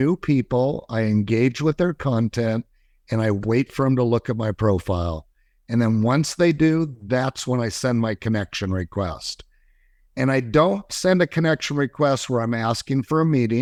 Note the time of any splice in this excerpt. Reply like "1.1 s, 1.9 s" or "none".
none